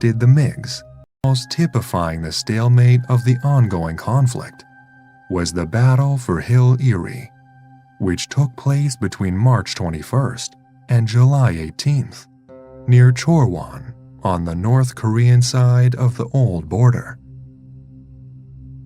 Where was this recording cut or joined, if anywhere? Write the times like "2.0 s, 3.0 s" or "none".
1.2 s